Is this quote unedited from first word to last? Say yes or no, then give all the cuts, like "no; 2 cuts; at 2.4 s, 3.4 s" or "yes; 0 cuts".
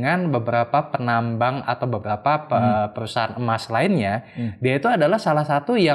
yes; 0 cuts